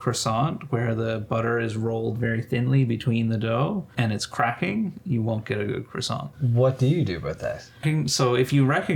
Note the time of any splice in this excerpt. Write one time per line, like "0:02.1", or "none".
0:03.9
0:06.4
0:07.8